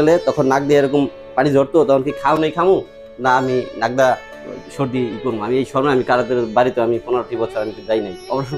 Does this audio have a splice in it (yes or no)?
no